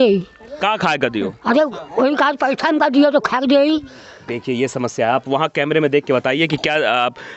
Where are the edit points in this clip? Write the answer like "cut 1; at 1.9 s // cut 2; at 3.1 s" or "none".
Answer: none

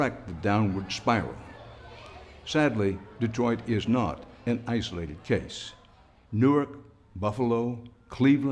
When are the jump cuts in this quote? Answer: none

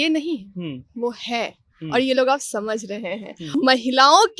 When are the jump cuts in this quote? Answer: cut 1; at 3.4 s

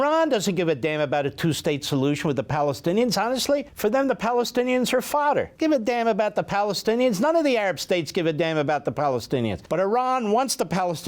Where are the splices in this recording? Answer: cut 1; at 3.7 s // cut 2; at 5.5 s // cut 3; at 9.6 s

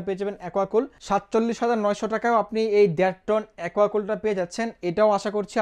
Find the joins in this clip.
cut 1; at 1.0 s

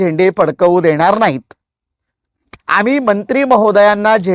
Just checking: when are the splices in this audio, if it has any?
cut 1; at 2.6 s

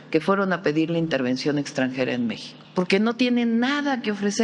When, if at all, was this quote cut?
cut 1; at 2.5 s

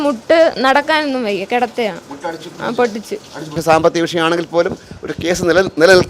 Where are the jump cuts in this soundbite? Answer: cut 1; at 3.6 s

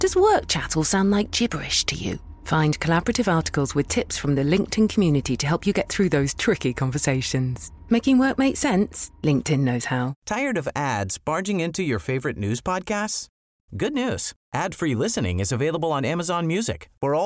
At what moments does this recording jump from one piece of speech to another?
cut 1; at 10.1 s

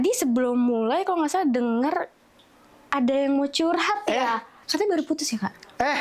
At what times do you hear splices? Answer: cut 1; at 4.6 s

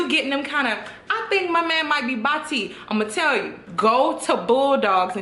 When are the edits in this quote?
cut 1; at 3.6 s

